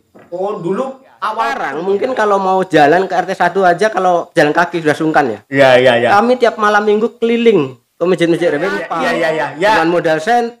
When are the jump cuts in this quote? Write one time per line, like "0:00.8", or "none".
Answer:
0:01.7
0:08.9